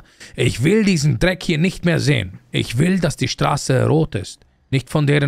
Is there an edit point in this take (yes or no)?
no